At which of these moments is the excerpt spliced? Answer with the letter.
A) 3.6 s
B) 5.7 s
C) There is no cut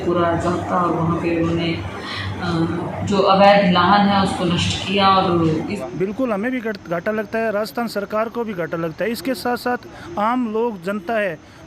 B